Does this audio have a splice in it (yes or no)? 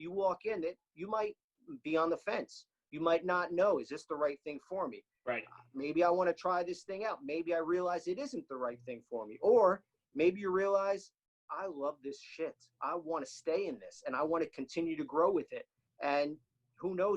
no